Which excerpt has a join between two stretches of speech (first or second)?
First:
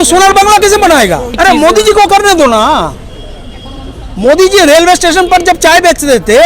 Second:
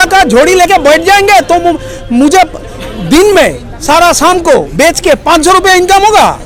first